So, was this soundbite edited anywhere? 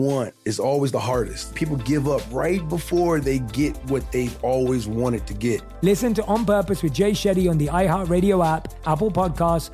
yes; 2 cuts; at 1.5 s, 5.7 s

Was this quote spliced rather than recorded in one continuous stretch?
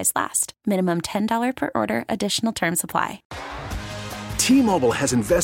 yes; 1 cut; at 3.3 s

